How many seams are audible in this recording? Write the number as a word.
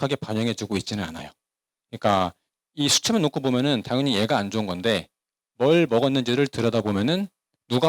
zero